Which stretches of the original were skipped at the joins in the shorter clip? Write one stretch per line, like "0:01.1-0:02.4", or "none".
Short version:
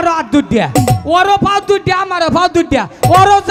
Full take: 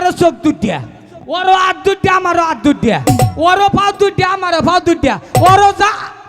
none